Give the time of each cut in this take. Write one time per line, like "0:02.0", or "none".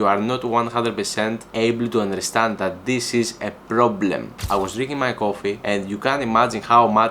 0:01.4
0:04.3
0:05.6